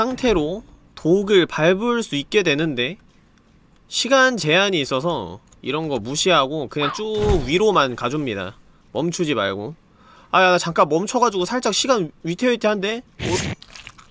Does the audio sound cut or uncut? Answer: uncut